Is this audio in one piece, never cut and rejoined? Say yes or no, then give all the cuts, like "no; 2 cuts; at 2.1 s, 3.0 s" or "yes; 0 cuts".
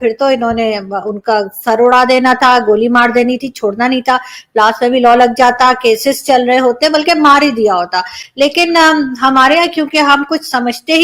yes; 0 cuts